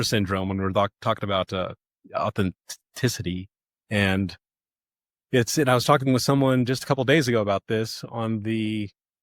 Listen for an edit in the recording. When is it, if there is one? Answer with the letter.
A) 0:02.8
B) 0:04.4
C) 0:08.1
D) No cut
D